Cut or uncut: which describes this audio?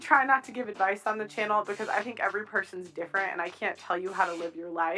cut